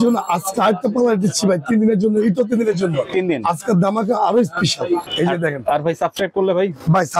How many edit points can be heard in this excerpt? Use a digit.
1